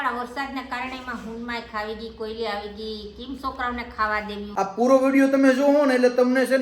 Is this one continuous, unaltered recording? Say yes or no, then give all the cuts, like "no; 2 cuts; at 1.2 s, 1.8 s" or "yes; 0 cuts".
no; 1 cut; at 4.4 s